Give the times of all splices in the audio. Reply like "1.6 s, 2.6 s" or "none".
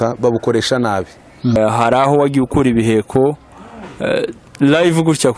1.6 s